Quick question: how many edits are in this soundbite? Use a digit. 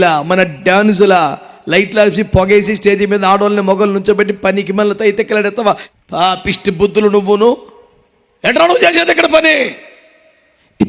1